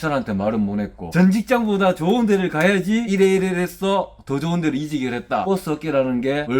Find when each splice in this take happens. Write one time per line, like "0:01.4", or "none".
0:01.0
0:05.4